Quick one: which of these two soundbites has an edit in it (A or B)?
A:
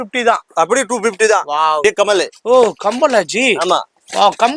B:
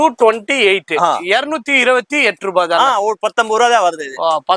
A